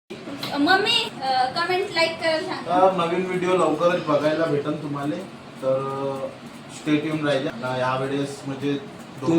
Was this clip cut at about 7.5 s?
yes; 2 cuts; at 1.1 s, 7.5 s

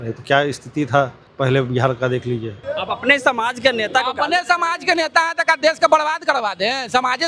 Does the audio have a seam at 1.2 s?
yes; 2 cuts; at 1.2 s, 2.6 s

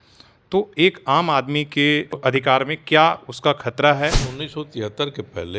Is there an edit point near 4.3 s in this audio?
yes; 2 cuts; at 2.2 s, 4.3 s

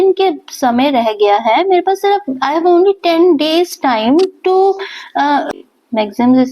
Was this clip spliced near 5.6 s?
yes; 1 cut; at 5.6 s

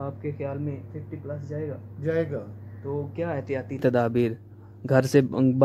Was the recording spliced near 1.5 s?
no; 1 cut; at 3.8 s

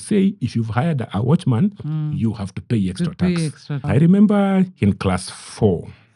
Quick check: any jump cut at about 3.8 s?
yes; 1 cut; at 3.8 s

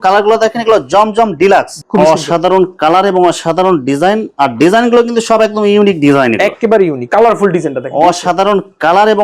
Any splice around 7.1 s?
yes; 2 cuts; at 1.8 s, 7.1 s

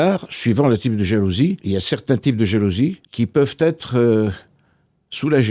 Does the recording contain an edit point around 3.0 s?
yes; 2 cuts; at 1.6 s, 3.0 s

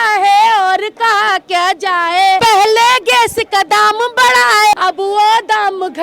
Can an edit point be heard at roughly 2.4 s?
yes; 2 cuts; at 2.4 s, 4.8 s

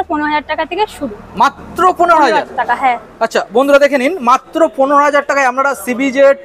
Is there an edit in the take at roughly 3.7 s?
no; 0 cuts

